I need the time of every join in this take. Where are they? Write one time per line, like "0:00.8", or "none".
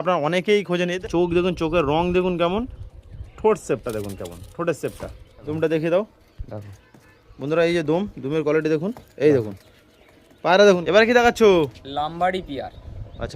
0:00.9
0:05.5
0:10.8